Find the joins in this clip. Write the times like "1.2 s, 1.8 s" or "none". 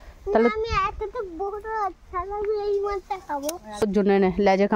3.8 s